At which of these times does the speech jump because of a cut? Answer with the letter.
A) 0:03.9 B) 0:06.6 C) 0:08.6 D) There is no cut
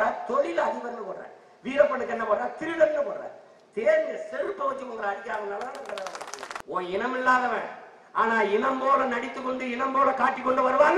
B